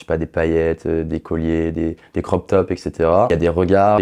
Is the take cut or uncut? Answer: uncut